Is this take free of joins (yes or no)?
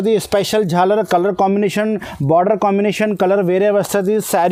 yes